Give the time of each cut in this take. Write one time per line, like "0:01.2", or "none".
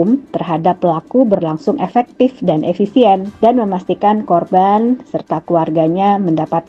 0:03.3